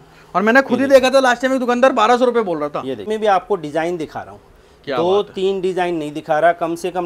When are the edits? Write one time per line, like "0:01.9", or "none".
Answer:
0:03.1

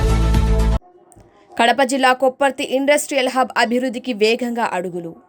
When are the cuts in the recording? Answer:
none

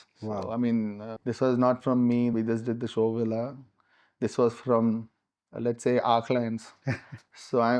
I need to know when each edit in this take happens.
0:01.1
0:02.3

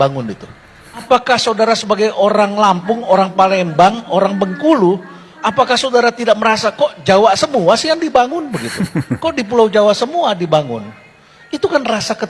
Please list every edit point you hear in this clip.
0:01.0

